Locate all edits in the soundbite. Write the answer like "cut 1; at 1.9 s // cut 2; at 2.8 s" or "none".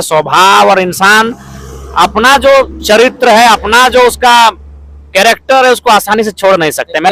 none